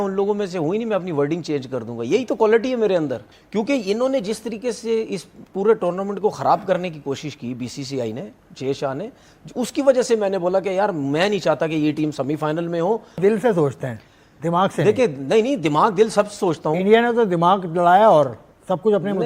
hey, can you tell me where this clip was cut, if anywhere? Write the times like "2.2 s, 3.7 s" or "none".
3.2 s, 13.2 s